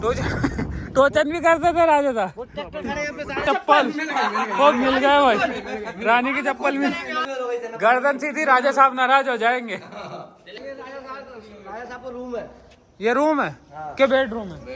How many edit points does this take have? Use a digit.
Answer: 3